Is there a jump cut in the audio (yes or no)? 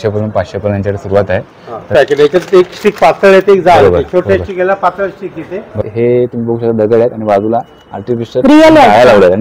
yes